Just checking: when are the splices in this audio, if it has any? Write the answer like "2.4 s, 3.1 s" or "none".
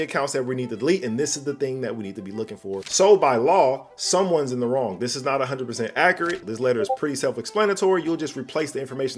2.8 s, 6.4 s